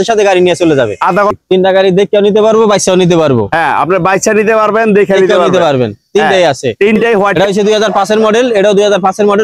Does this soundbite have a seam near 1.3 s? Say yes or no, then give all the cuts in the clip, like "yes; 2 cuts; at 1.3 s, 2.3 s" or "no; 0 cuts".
yes; 2 cuts; at 1.3 s, 7.3 s